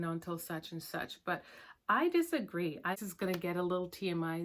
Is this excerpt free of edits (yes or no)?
no